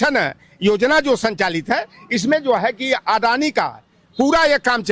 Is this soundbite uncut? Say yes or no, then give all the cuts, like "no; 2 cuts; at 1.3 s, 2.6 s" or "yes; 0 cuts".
yes; 0 cuts